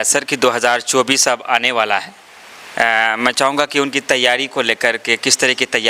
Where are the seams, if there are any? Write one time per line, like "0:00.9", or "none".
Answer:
none